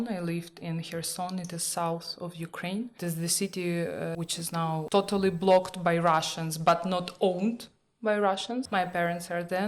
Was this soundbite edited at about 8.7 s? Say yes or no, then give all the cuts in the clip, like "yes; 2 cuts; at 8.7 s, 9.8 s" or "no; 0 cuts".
yes; 3 cuts; at 3.0 s, 4.2 s, 8.7 s